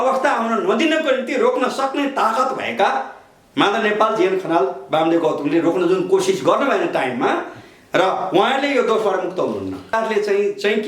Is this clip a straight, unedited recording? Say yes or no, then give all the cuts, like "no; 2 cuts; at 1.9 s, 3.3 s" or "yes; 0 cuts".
no; 1 cut; at 9.9 s